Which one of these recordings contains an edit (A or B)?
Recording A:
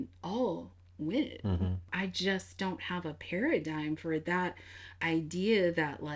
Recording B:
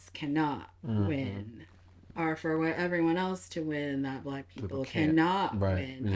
A